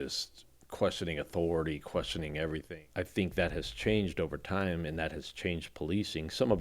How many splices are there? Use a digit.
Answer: 1